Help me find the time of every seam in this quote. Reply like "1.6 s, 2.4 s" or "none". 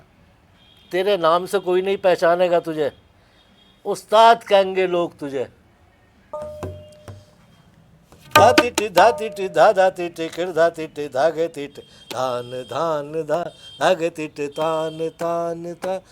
6.3 s